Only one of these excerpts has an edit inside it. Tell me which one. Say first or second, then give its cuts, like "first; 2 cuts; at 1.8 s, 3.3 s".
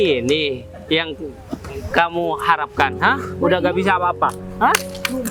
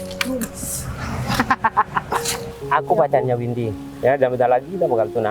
second; 1 cut; at 2.4 s